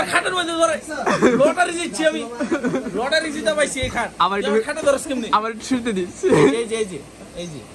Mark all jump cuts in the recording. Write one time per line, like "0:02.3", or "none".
none